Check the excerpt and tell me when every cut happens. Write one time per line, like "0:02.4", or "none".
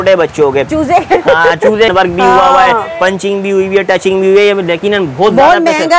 0:01.9